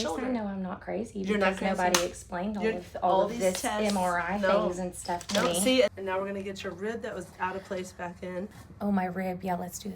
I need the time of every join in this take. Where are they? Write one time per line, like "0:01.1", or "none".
0:05.9
0:08.6

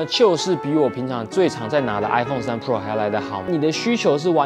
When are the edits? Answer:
0:03.5

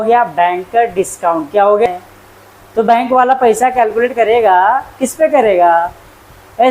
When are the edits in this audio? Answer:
0:01.9

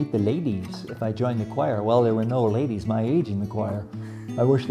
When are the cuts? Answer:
none

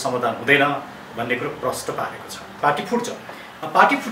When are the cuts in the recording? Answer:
0:02.5

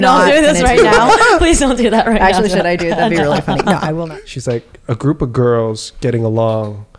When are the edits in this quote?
0:04.0

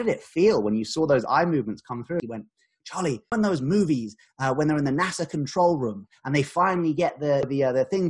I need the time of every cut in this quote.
0:02.2

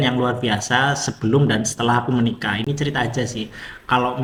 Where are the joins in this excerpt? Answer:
none

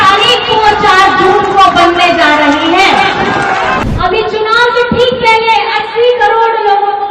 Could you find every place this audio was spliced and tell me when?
0:03.8

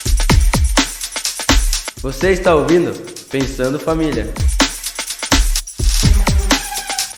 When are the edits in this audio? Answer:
none

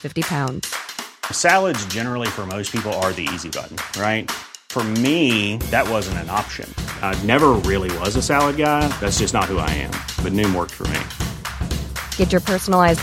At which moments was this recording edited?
none

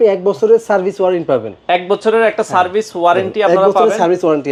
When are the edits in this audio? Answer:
none

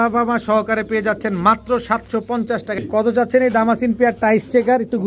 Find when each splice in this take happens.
0:02.8

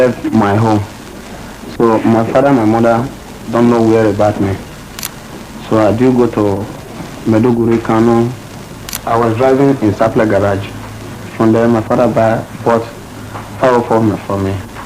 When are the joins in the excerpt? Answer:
0:08.9

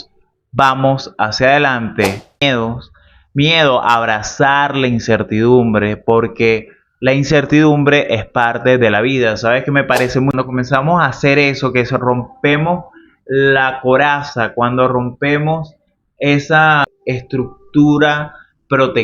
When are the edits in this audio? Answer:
0:02.4
0:10.3
0:16.9

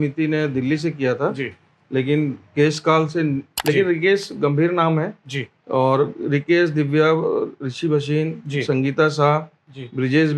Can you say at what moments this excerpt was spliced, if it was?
0:03.5

